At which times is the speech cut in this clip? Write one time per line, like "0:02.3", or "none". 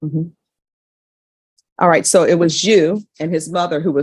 none